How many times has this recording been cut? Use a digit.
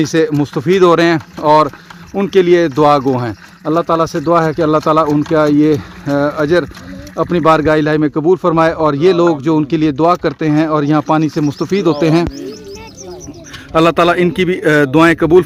0